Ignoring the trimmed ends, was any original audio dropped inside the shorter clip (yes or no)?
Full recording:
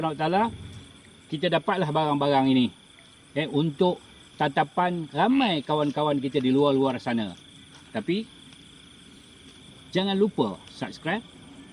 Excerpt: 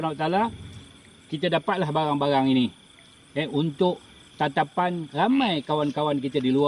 no